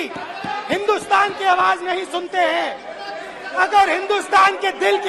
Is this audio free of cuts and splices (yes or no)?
yes